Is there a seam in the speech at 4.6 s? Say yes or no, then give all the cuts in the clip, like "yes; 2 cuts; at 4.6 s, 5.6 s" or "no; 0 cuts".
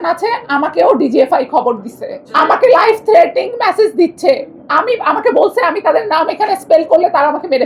no; 0 cuts